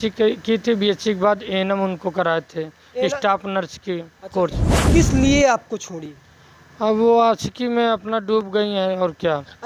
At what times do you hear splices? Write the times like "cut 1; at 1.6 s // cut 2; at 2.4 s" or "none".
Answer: cut 1; at 4.8 s